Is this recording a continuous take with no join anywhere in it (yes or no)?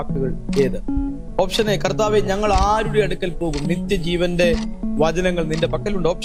yes